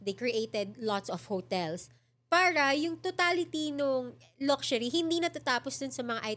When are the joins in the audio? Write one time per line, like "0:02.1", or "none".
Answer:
none